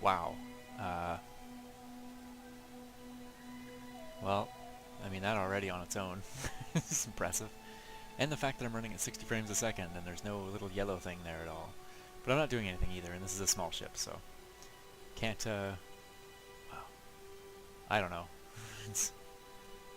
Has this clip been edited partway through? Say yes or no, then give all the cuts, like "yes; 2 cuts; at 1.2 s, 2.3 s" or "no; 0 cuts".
yes; 1 cut; at 6.6 s